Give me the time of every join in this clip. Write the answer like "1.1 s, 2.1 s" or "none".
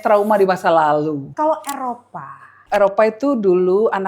1.3 s, 2.6 s